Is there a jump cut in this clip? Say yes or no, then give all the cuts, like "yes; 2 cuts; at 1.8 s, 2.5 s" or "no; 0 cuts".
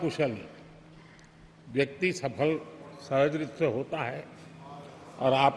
no; 0 cuts